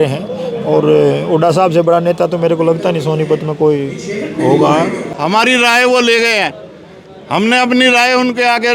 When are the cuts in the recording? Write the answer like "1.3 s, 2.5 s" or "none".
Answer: 5.1 s